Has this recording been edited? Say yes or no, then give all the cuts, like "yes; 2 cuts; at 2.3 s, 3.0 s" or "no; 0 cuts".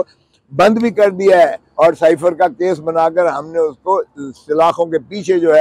no; 0 cuts